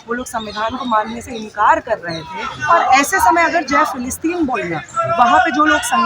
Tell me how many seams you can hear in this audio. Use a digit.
1